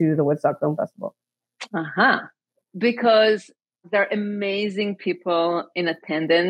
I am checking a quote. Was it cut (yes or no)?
yes